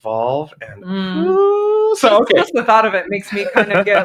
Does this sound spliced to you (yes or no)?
no